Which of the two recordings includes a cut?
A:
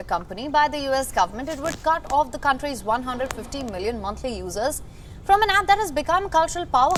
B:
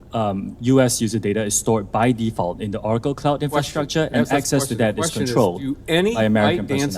B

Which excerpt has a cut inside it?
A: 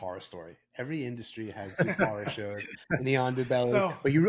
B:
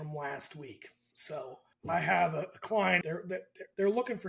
B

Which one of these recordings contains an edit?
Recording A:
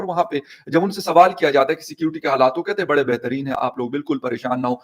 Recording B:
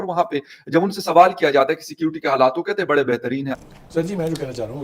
B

